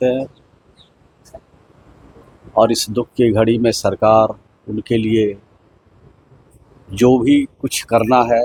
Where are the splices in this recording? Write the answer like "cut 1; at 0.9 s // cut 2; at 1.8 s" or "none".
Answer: none